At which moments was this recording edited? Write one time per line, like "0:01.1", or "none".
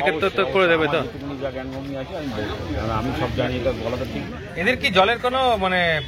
0:04.2